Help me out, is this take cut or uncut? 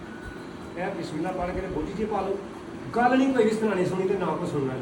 uncut